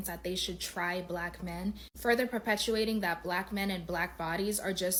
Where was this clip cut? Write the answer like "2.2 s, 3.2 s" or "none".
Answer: none